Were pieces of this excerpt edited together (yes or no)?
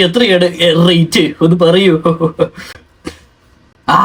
no